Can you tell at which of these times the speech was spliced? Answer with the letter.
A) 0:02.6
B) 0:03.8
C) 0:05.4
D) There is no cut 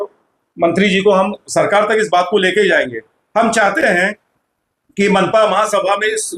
D